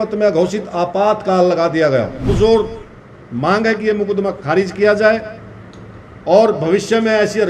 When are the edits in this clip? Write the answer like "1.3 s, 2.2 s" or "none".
2.3 s

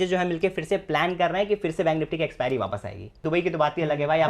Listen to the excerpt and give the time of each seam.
3.2 s

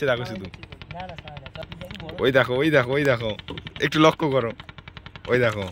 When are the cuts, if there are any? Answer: 1.6 s

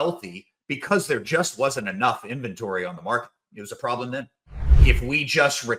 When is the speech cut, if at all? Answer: 4.7 s

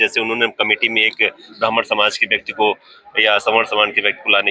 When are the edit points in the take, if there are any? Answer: none

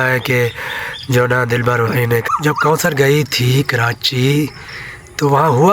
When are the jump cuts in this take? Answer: 2.3 s

